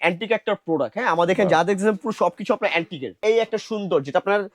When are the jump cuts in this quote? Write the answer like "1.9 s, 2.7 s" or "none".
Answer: 3.2 s